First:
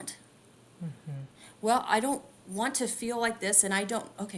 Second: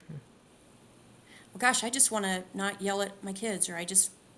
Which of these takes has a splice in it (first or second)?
first